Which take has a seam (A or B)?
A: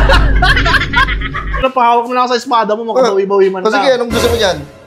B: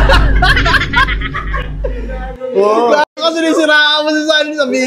A